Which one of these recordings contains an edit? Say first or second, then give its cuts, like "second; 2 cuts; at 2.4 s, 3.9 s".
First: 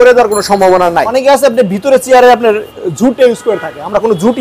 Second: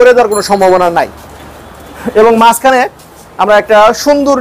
first; 1 cut; at 1.1 s